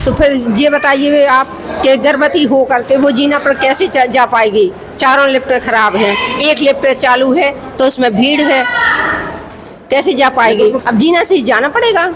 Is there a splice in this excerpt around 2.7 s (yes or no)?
no